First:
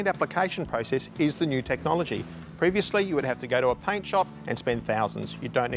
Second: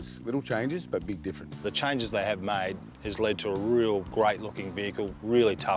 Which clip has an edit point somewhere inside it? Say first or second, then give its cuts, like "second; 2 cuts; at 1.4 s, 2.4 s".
second; 2 cuts; at 1.6 s, 4.1 s